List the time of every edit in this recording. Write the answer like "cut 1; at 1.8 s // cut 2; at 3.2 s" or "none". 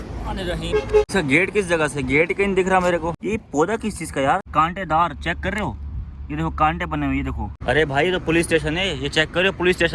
cut 1; at 1.1 s // cut 2; at 3.2 s // cut 3; at 4.5 s // cut 4; at 7.6 s